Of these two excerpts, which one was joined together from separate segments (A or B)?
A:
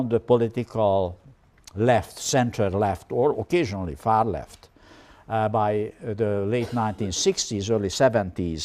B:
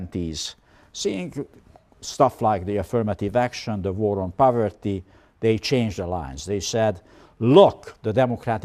A